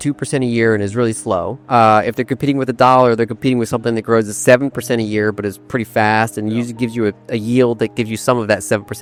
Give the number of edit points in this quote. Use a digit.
0